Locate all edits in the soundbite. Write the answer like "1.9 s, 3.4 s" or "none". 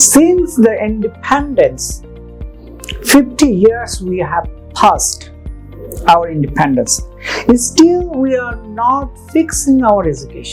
none